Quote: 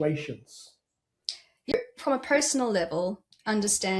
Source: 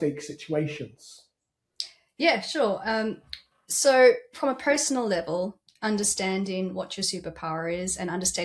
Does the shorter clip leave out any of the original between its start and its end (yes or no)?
yes